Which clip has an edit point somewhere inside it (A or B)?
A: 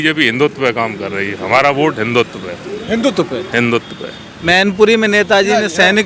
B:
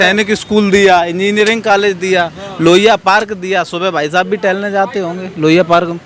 A